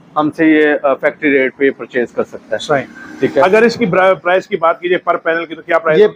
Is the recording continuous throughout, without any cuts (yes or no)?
yes